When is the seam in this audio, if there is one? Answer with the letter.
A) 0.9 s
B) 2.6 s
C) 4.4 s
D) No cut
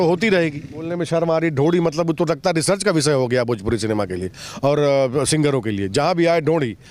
A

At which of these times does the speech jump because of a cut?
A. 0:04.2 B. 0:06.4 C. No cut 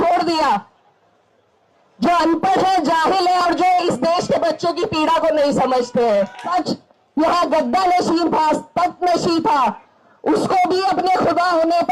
B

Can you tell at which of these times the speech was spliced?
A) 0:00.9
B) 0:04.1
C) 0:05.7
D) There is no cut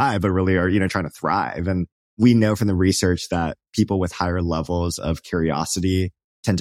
A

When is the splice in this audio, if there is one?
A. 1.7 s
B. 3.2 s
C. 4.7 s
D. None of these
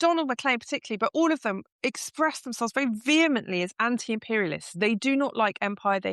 A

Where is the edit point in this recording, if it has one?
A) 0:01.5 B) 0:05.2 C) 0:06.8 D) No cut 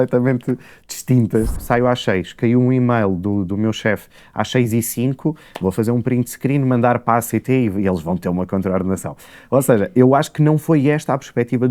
A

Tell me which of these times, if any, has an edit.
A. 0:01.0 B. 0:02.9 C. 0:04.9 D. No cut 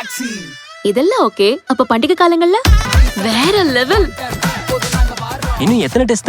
B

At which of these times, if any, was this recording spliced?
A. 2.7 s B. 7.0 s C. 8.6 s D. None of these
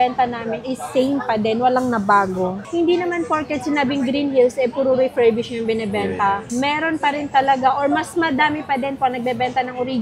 A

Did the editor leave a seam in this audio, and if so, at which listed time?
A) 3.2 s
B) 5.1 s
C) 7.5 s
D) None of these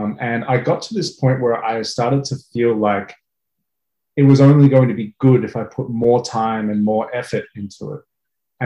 D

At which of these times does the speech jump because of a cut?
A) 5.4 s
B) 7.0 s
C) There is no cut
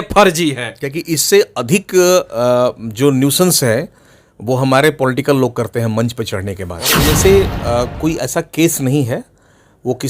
B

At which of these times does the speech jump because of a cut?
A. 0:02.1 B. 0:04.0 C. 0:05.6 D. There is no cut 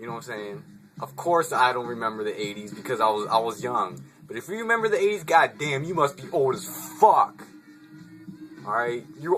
A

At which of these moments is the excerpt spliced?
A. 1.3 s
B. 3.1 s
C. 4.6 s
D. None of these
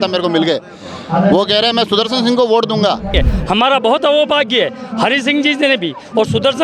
B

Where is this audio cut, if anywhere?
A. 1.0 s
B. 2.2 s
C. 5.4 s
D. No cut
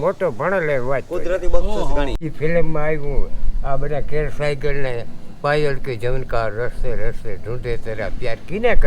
B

